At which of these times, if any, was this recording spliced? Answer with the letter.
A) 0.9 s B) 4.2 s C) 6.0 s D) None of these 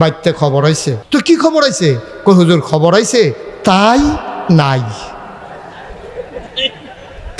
A